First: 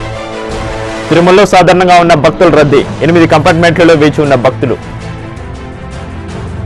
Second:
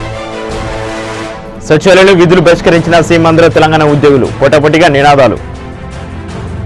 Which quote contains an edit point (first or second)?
second